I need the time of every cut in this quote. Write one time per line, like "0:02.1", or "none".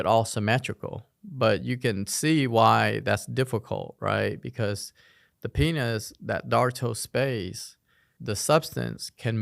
none